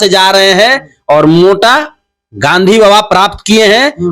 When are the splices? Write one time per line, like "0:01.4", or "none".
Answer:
none